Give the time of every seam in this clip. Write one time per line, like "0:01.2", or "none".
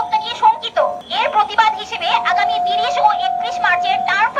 0:01.0